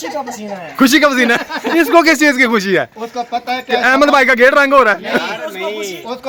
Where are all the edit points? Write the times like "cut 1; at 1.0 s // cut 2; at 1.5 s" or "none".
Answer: none